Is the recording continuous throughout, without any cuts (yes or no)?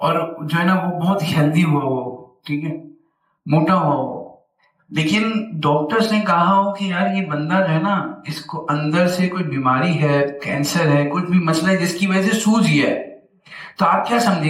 yes